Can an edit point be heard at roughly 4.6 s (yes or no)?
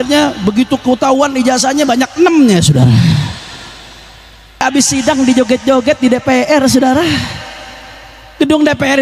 yes